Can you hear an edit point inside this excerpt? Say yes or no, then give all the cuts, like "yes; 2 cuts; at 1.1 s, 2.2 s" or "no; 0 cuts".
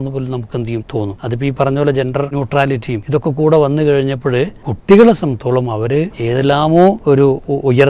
yes; 5 cuts; at 1.1 s, 2.6 s, 4.7 s, 6.2 s, 7.0 s